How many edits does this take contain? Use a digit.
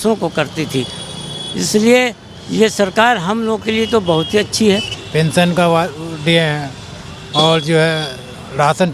1